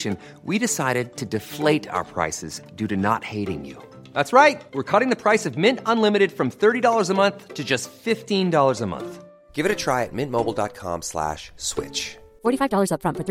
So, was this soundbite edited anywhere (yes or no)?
no